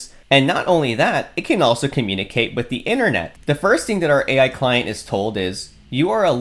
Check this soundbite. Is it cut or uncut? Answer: cut